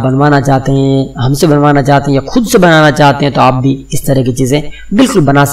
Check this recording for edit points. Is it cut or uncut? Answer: uncut